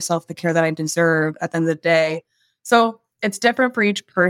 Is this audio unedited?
no; 1 cut; at 3.1 s

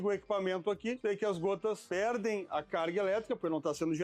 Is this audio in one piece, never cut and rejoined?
no; 2 cuts; at 1.0 s, 1.8 s

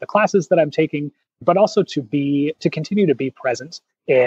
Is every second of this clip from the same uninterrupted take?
no; 1 cut; at 1.4 s

